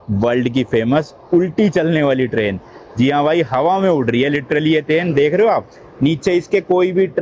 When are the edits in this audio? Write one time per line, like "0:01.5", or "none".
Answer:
none